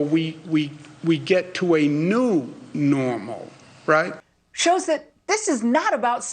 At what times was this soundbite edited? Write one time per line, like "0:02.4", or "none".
0:04.2